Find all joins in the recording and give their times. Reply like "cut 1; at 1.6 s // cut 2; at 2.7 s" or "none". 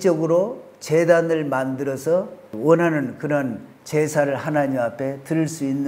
cut 1; at 2.4 s